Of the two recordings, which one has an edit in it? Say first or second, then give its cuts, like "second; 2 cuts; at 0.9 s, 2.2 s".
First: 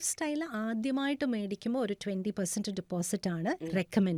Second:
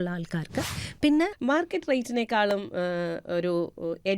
second; 1 cut; at 1.3 s